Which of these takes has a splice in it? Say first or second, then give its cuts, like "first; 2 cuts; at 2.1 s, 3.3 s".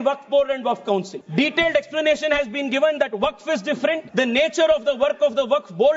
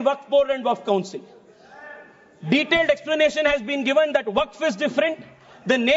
first; 2 cuts; at 1.2 s, 4.1 s